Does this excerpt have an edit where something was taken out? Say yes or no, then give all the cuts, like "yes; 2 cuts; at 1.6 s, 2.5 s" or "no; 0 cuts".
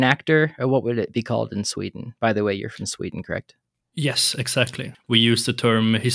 no; 0 cuts